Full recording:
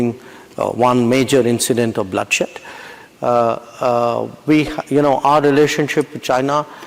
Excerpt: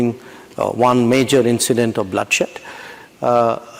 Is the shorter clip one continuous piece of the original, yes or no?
yes